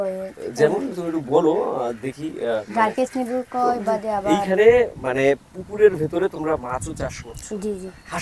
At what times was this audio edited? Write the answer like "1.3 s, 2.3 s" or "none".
4.3 s